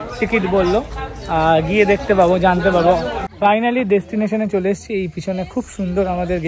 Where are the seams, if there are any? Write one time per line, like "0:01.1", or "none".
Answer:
0:03.3